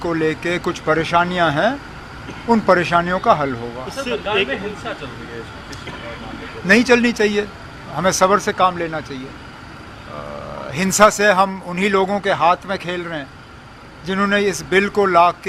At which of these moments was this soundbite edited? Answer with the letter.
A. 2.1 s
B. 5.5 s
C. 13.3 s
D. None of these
D